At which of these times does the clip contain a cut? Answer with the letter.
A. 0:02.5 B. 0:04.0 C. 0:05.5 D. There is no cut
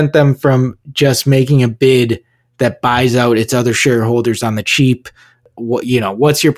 C